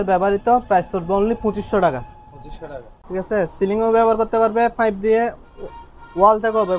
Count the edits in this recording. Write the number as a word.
one